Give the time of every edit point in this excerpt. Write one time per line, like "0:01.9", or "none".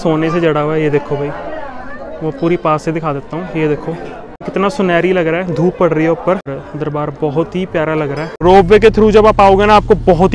0:04.5
0:06.5
0:08.2